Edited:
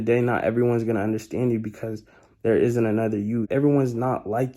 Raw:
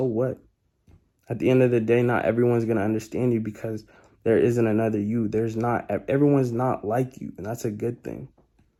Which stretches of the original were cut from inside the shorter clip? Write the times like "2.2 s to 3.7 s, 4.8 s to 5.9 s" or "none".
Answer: 5.3 s to 6.0 s